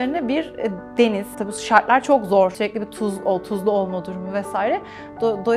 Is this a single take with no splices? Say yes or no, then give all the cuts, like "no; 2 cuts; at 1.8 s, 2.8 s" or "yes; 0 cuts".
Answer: no; 2 cuts; at 1.4 s, 2.5 s